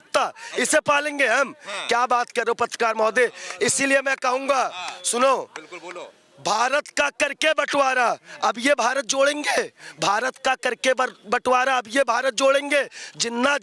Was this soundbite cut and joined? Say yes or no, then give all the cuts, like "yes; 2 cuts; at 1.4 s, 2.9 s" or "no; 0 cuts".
no; 0 cuts